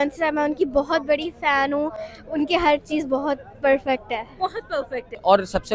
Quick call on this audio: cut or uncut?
uncut